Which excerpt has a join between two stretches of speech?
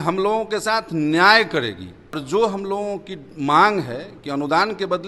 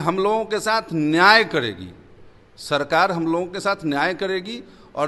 first; 1 cut; at 2.2 s

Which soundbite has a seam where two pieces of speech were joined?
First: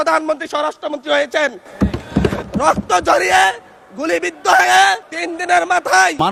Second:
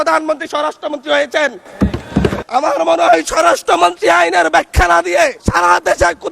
second; 2 cuts; at 2.4 s, 5.4 s

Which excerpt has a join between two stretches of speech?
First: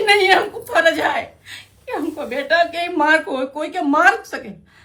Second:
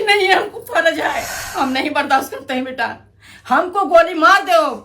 second; 1 cut; at 1.4 s

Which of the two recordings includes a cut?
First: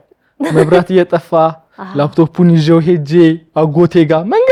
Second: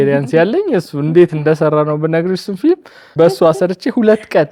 second; 1 cut; at 3.0 s

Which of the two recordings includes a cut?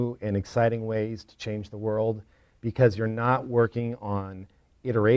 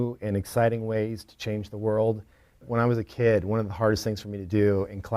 second; 1 cut; at 2.7 s

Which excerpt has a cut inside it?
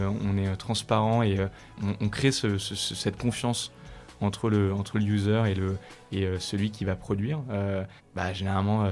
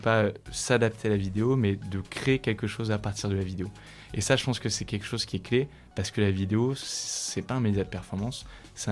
first; 2 cuts; at 1.7 s, 8.0 s

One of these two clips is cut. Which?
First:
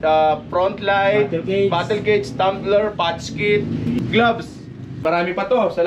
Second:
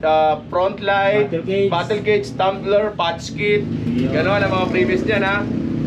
first; 2 cuts; at 4.0 s, 5.0 s

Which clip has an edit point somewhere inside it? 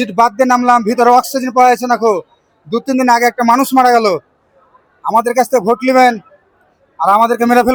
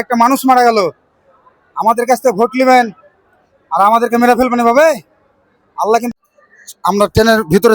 second; 1 cut; at 6.1 s

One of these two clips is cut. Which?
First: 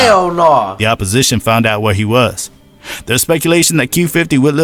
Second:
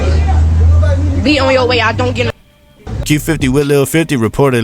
second; 1 cut; at 2.9 s

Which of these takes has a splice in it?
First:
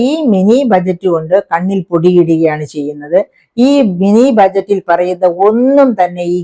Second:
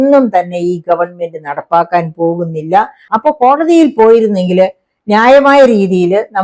second; 1 cut; at 3.0 s

